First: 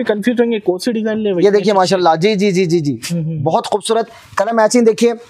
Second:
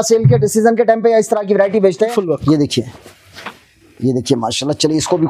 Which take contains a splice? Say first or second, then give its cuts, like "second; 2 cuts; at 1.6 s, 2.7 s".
second; 1 cut; at 2.1 s